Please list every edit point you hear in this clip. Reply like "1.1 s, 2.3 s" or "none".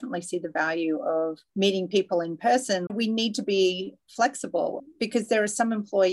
1.4 s, 2.9 s, 4.8 s